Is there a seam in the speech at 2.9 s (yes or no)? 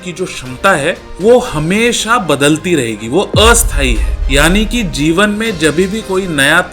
no